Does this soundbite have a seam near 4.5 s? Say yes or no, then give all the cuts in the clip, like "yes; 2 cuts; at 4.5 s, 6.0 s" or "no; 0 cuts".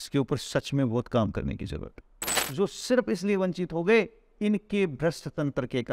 no; 1 cut; at 2.4 s